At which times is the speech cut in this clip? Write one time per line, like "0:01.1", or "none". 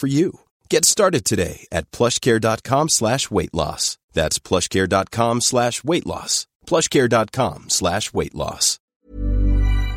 0:08.9